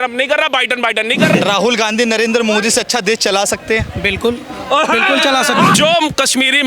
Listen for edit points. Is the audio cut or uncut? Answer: cut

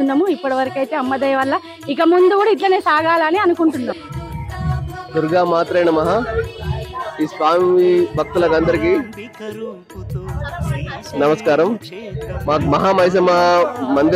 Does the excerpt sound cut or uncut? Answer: uncut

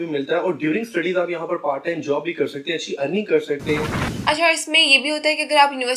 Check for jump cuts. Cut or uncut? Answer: cut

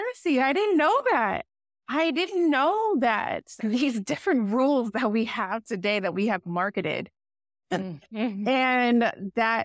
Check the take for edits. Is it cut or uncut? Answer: uncut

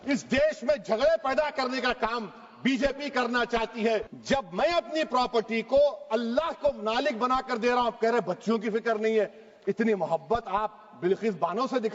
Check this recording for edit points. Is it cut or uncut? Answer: cut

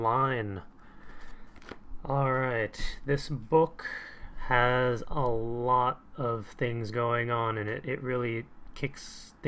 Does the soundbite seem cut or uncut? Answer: cut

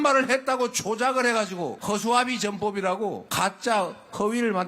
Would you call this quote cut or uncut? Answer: cut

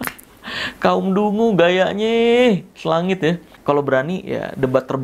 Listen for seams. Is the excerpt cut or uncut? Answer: cut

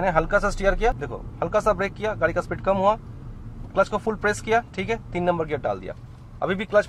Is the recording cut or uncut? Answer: cut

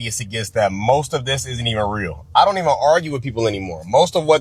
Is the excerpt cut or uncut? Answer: uncut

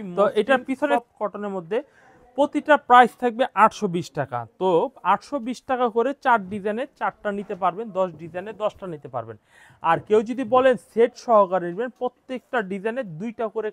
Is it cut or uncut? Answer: cut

